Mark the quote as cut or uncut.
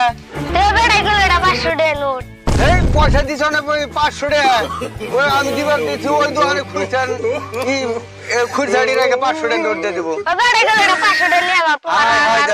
uncut